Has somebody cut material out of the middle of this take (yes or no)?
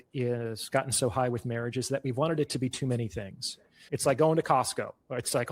yes